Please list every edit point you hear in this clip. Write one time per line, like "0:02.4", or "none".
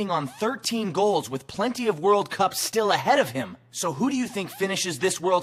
none